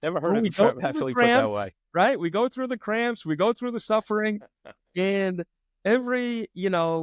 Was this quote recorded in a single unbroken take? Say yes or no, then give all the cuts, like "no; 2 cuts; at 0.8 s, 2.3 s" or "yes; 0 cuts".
yes; 0 cuts